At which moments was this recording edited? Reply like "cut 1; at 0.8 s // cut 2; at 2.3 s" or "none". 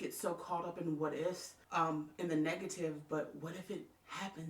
cut 1; at 1.5 s